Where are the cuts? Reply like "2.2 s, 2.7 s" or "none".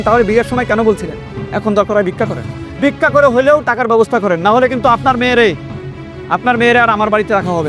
none